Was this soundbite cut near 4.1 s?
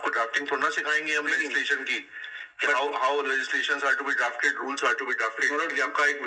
no; 0 cuts

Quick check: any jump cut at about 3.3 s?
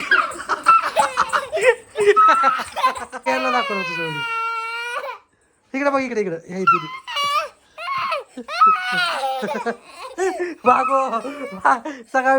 yes; 1 cut; at 3.3 s

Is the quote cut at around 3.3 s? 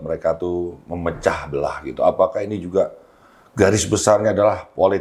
no; 0 cuts

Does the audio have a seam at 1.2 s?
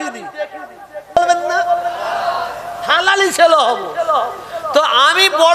yes; 1 cut; at 1.2 s

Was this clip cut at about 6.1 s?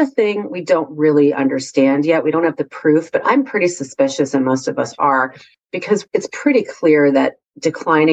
yes; 1 cut; at 6.1 s

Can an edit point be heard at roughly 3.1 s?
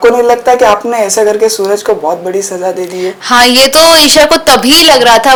no; 0 cuts

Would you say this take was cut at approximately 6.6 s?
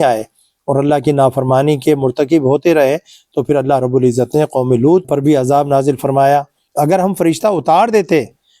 yes; 2 cuts; at 5.1 s, 6.6 s

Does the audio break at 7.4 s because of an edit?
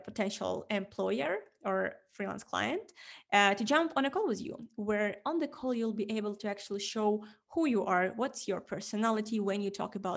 no; 0 cuts

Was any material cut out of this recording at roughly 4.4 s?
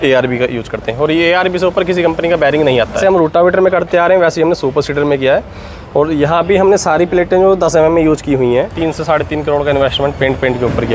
no; 2 cuts; at 3.0 s, 8.6 s

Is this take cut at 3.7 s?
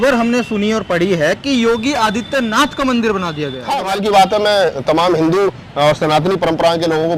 yes; 1 cut; at 3.7 s

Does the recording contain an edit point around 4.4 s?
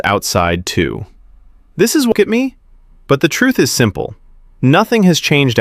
no; 1 cut; at 2.1 s

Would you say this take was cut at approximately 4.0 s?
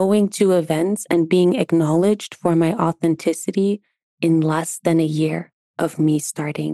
yes; 1 cut; at 4.0 s

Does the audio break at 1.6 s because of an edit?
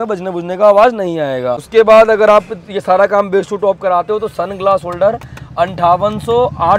yes; 1 cut; at 1.6 s

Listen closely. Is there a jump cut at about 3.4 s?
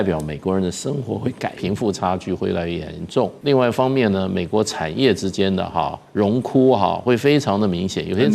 yes; 2 cuts; at 1.6 s, 3.4 s

